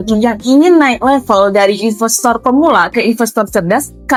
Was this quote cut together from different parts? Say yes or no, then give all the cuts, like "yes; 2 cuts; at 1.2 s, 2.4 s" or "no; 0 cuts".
no; 0 cuts